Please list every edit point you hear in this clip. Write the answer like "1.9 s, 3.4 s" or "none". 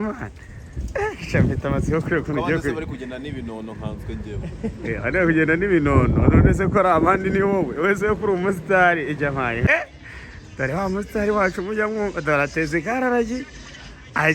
9.7 s